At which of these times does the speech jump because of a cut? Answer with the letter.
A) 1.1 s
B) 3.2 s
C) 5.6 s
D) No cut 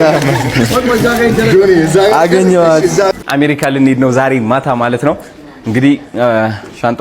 B